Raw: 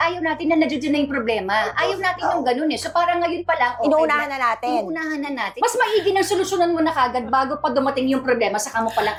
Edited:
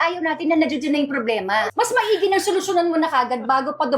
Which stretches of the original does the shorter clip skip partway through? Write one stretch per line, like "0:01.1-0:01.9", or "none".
0:01.7-0:05.5

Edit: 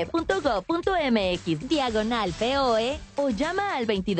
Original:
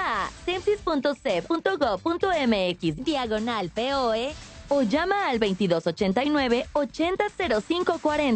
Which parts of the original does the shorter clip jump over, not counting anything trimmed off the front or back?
0:04.4-0:04.6

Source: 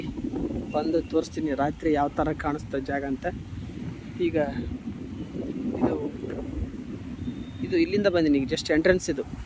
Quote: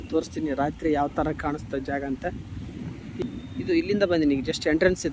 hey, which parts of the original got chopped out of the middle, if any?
0:04.2-0:07.3

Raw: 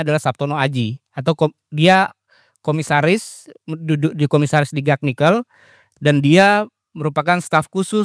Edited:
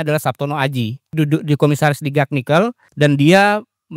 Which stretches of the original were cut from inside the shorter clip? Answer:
0:01.0-0:03.7
0:05.5-0:05.9

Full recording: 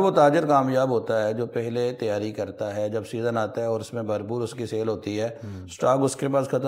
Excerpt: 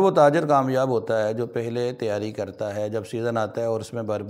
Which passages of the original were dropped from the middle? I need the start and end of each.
none

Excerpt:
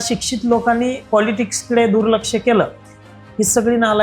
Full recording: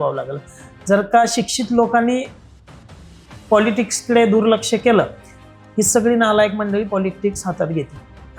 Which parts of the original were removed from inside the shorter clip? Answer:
0:02.3-0:03.4

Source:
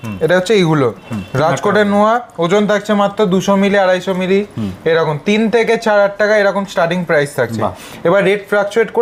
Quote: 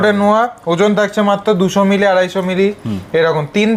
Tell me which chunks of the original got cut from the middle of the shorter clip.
none

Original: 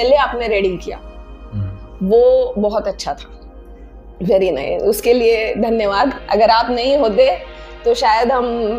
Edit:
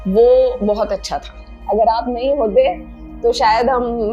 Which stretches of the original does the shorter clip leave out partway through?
0:03.5-0:06.2

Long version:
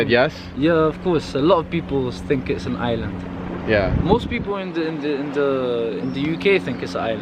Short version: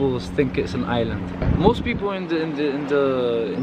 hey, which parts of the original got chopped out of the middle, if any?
0:03.4-0:03.9

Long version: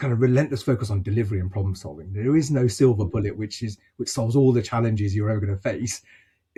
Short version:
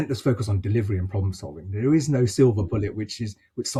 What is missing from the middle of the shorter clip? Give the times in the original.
none

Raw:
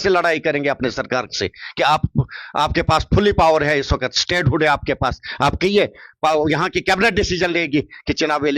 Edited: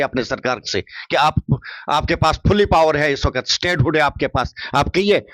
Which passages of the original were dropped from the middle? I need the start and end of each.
none

